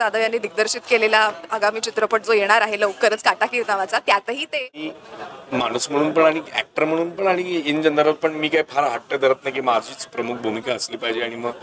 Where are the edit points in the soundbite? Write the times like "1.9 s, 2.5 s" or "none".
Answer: 4.9 s